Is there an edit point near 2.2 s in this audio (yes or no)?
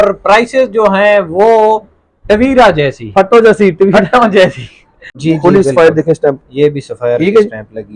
no